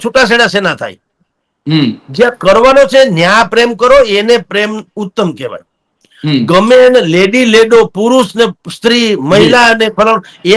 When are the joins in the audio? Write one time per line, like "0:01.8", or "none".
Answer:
none